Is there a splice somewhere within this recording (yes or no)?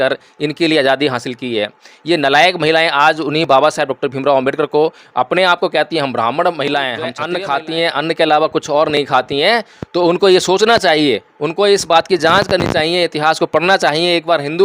yes